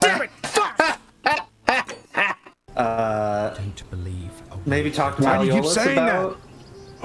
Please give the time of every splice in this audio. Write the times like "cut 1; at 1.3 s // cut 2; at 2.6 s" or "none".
cut 1; at 2.4 s